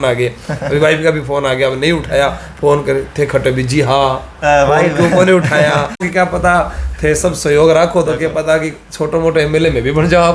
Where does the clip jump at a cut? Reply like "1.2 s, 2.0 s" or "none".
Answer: 6.1 s

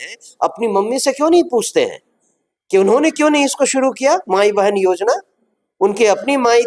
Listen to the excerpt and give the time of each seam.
none

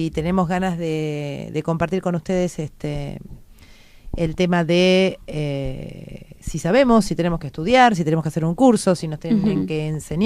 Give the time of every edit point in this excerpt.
none

